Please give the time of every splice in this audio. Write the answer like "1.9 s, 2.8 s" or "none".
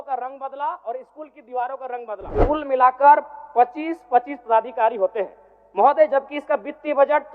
2.4 s